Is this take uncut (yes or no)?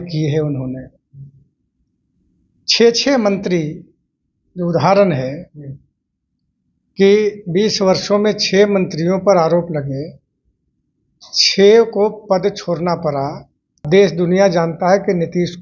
no